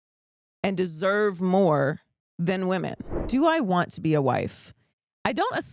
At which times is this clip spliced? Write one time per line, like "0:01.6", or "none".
0:03.1